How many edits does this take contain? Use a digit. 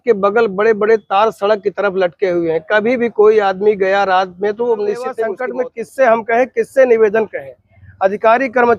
1